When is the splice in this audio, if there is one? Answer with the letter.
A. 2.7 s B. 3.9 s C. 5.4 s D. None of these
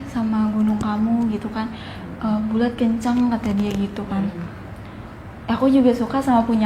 D